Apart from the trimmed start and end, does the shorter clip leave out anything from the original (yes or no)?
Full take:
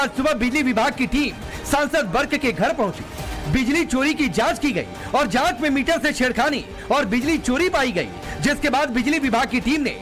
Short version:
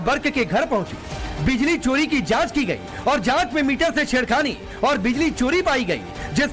no